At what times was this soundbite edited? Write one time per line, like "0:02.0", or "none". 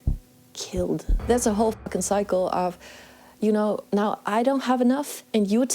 0:01.1